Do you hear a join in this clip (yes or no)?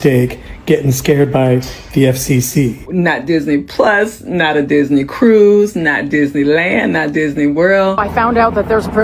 no